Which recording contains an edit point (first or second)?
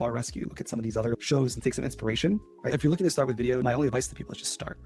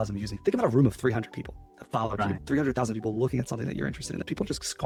first